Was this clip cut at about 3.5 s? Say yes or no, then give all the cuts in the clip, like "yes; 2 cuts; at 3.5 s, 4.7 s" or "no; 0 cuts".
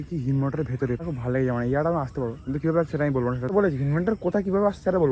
yes; 2 cuts; at 1.1 s, 3.5 s